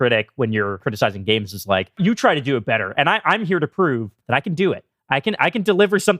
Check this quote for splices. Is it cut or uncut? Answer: cut